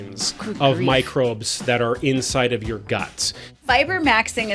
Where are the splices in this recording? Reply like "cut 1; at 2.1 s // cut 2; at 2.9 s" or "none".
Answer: cut 1; at 3.6 s